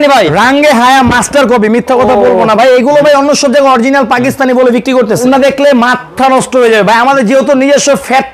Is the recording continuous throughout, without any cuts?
no; 1 cut; at 5.2 s

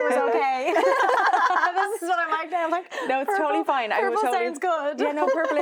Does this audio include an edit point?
no; 0 cuts

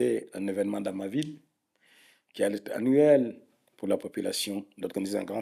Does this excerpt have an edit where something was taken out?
no; 0 cuts

